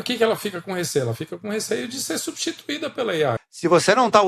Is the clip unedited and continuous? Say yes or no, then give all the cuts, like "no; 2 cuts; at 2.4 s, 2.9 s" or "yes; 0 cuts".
no; 1 cut; at 3.4 s